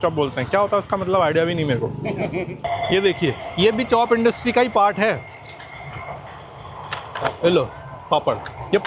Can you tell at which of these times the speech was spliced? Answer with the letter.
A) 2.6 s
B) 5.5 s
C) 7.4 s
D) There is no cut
A